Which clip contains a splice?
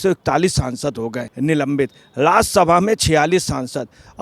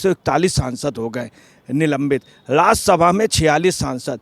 first; 1 cut; at 1.2 s

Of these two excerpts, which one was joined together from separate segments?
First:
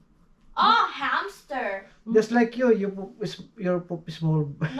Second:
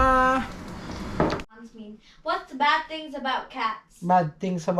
second; 1 cut; at 1.6 s

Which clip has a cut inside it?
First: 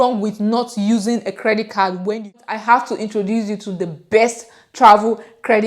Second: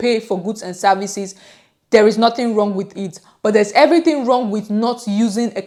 first; 1 cut; at 2.4 s

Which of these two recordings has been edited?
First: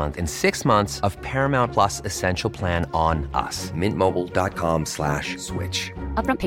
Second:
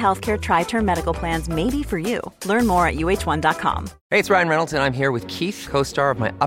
second; 1 cut; at 3.9 s

